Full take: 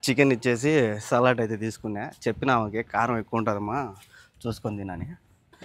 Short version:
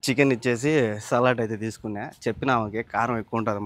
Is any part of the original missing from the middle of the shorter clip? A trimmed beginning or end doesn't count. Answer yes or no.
no